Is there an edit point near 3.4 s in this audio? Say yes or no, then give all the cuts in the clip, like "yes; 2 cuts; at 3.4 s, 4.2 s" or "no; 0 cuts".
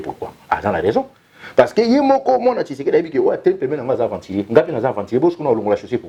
no; 0 cuts